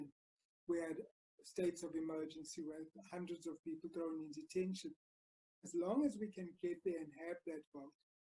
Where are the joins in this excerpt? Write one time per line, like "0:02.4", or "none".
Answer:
0:05.2

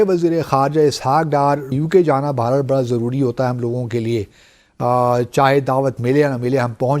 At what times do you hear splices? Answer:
0:01.7

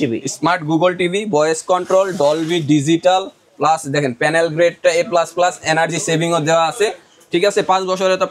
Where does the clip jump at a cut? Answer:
none

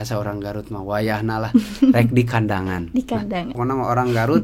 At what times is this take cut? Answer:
0:03.5

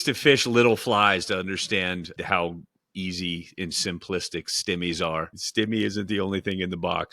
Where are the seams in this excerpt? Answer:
0:02.1
0:05.4

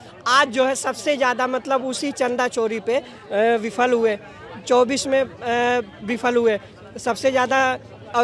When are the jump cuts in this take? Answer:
none

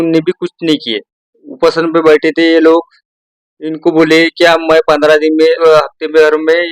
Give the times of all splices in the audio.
0:05.6

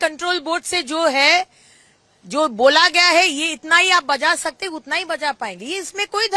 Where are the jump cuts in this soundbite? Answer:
none

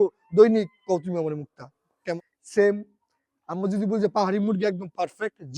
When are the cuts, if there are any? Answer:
0:02.2

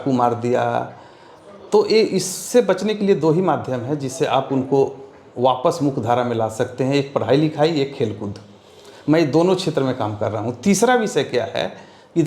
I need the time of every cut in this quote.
none

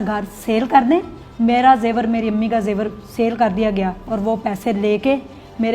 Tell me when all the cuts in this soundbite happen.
0:01.2

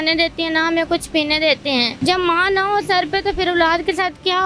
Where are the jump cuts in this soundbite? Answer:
0:01.9

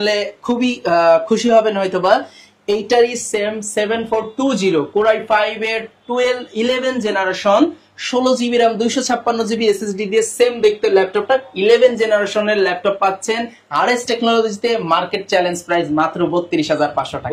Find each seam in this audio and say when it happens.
none

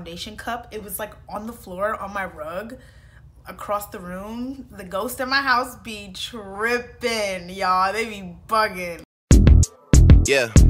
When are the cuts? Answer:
0:08.9

